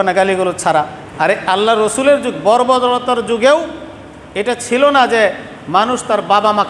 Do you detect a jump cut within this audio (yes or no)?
yes